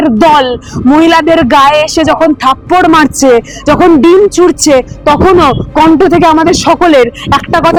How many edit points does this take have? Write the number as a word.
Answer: zero